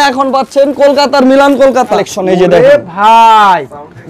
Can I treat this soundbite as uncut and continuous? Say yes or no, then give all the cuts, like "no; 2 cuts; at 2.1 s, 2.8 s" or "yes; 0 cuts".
no; 1 cut; at 2.0 s